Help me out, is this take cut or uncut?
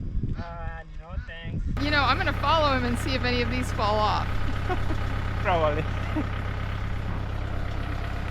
cut